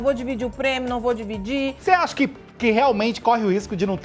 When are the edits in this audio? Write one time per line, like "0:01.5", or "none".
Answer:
0:01.8